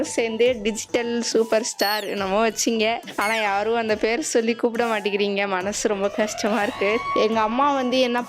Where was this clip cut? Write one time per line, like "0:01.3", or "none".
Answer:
0:07.0